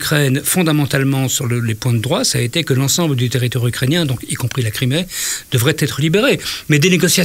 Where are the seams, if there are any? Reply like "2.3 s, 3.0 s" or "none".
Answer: none